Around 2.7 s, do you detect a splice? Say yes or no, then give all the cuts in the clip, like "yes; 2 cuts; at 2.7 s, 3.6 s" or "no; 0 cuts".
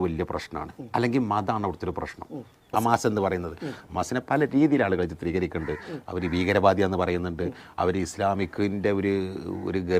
yes; 1 cut; at 2.7 s